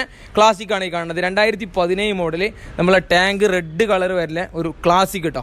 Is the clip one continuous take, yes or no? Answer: yes